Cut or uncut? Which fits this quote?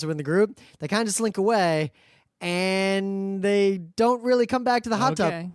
cut